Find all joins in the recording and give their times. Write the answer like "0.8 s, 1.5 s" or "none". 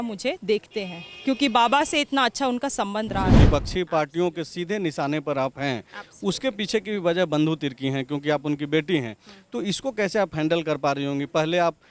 3.3 s